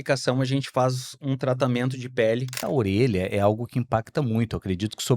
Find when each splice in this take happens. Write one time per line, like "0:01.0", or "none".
0:02.6

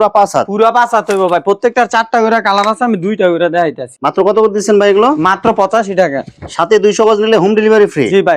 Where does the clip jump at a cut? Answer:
none

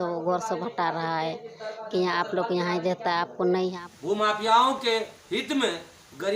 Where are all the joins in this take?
0:03.8

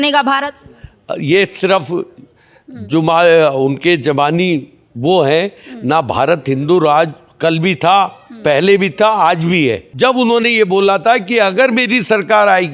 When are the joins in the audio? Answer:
0:09.9

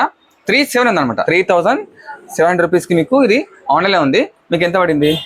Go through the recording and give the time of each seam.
0:01.2

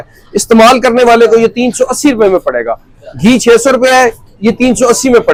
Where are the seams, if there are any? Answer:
none

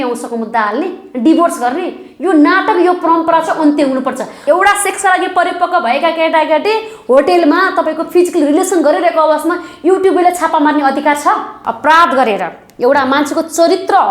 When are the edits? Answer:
0:04.4
0:11.7

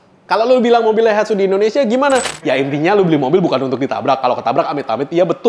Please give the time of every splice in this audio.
0:02.4

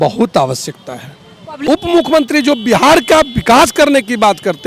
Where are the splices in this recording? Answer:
0:01.6

